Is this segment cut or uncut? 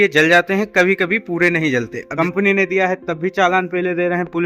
cut